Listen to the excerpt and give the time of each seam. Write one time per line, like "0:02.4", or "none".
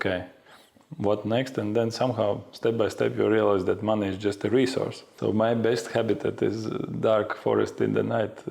0:05.0

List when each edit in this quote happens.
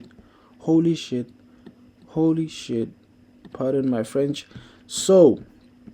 none

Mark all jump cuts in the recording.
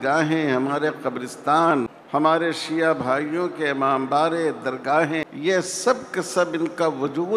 0:02.0
0:05.3

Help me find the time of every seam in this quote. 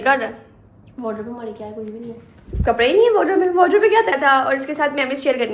0:04.1

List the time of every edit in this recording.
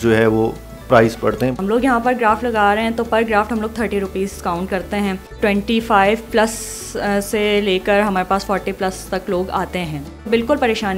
0:01.6
0:05.4
0:10.3

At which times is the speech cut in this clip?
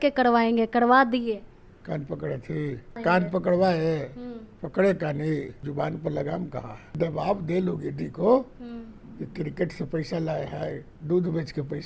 0:03.0
0:05.6
0:07.0

